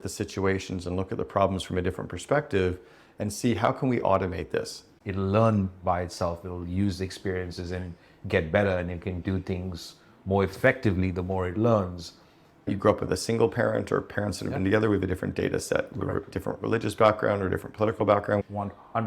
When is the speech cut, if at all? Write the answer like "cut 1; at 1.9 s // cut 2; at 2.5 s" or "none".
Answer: cut 1; at 4.8 s // cut 2; at 12.7 s